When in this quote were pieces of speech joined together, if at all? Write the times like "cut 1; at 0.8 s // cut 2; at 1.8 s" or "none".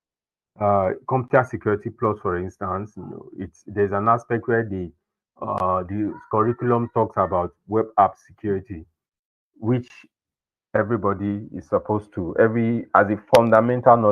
cut 1; at 6.2 s